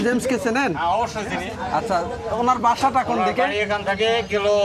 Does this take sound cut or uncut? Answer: uncut